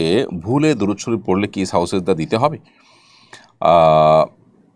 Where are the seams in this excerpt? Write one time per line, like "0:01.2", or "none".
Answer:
none